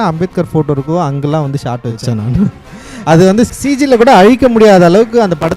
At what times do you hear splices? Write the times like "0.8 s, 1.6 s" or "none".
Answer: 3.5 s